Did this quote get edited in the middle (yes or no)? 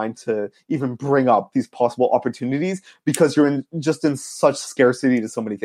no